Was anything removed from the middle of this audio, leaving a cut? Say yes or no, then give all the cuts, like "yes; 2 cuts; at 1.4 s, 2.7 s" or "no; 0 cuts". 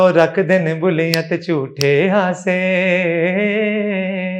no; 0 cuts